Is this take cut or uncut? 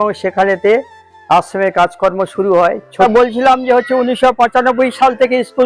cut